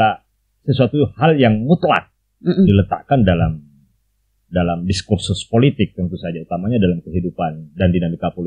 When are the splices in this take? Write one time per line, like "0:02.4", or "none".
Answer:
none